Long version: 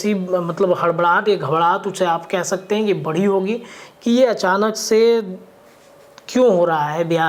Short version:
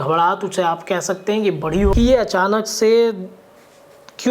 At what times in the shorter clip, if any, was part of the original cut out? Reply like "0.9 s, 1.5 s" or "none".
1.9 s